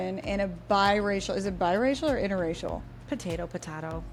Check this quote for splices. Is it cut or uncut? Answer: uncut